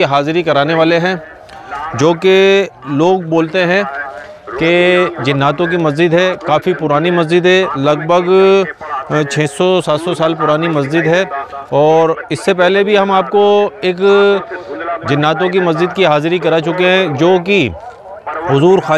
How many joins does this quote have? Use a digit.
0